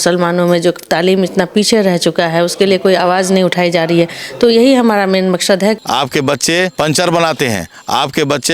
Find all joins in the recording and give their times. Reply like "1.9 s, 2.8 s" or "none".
5.8 s, 6.7 s